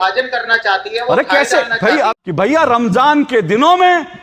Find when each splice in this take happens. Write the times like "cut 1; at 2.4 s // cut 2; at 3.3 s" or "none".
cut 1; at 2.1 s